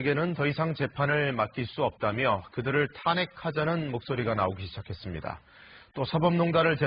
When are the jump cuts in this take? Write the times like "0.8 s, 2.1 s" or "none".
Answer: none